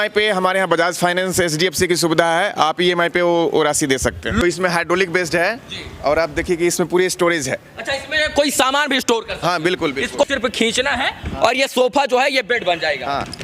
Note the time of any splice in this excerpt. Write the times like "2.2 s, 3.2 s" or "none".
4.4 s, 10.2 s